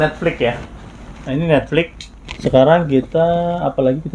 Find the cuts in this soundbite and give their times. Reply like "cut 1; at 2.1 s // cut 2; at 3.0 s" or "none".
cut 1; at 2.1 s